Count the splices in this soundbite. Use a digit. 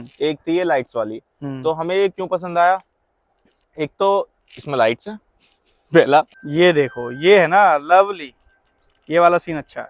1